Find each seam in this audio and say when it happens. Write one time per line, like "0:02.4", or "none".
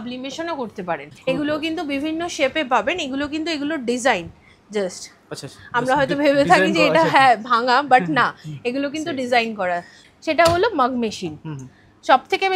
0:01.1
0:10.0